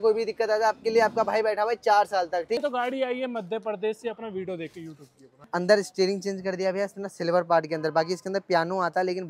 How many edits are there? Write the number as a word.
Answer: two